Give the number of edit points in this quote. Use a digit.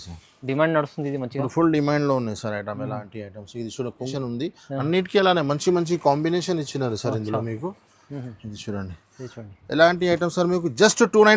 1